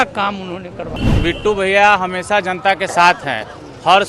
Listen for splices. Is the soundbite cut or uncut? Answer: cut